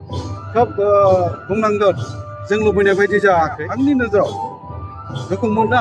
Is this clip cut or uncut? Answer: cut